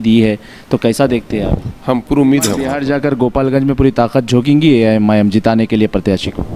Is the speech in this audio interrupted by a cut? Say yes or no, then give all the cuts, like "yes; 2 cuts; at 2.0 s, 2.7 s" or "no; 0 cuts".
yes; 1 cut; at 2.7 s